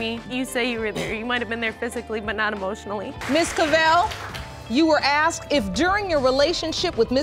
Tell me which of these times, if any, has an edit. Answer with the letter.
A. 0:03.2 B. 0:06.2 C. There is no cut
A